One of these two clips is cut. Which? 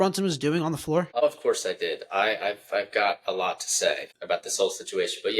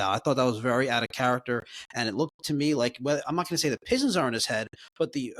first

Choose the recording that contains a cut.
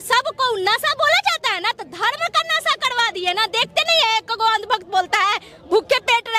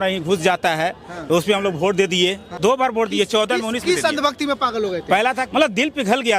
second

